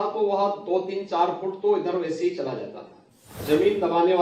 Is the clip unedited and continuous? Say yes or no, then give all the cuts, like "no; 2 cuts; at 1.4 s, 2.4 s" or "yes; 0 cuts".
no; 1 cut; at 3.3 s